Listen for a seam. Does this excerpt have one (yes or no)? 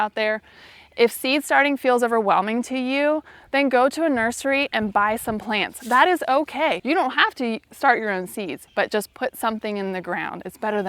yes